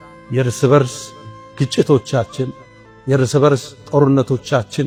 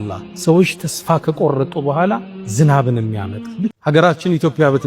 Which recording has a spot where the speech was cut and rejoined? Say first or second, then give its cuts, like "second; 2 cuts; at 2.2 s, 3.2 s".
second; 1 cut; at 3.8 s